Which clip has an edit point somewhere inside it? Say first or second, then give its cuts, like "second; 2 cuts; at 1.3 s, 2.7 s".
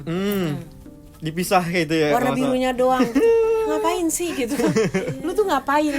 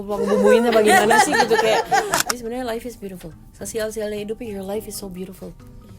second; 1 cut; at 2.2 s